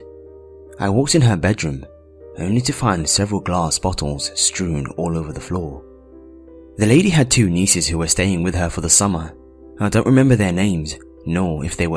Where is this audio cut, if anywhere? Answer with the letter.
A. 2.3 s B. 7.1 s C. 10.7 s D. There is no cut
B